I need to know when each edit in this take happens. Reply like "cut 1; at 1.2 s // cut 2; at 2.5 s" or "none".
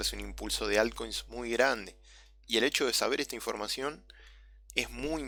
none